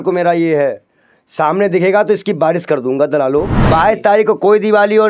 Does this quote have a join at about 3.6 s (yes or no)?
yes